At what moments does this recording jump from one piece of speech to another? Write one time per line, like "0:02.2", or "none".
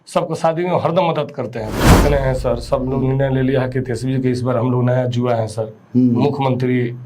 0:01.9